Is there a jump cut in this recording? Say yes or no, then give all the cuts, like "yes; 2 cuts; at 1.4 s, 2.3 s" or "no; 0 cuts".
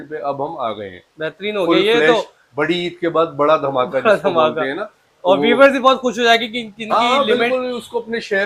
no; 0 cuts